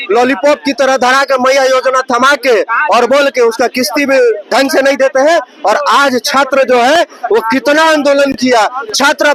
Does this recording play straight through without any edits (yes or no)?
yes